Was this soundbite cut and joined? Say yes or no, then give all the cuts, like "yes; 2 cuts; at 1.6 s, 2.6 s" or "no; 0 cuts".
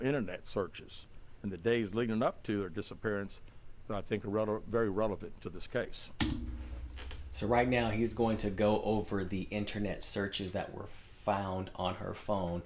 no; 0 cuts